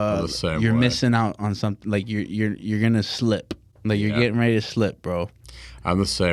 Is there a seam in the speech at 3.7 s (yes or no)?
no